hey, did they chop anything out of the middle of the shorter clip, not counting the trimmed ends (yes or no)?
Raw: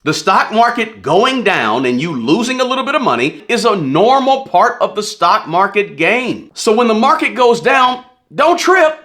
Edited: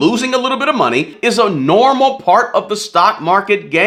no